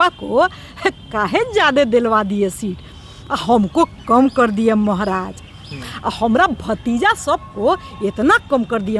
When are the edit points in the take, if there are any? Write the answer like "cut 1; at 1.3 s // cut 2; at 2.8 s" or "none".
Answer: none